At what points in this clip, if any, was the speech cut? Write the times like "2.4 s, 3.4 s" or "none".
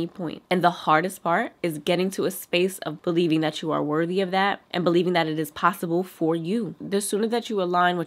2.9 s